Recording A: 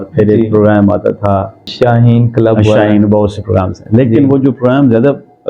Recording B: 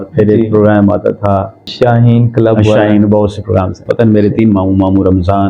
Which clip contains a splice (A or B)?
B